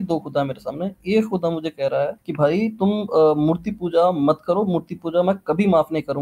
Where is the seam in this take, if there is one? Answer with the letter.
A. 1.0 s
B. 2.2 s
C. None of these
B